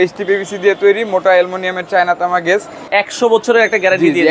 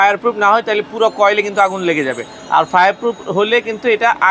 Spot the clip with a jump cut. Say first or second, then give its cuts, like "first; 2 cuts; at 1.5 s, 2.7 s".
first; 1 cut; at 2.9 s